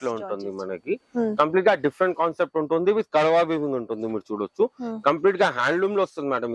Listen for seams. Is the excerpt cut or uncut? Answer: uncut